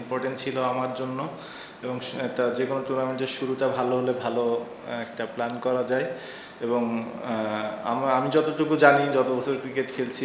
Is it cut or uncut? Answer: uncut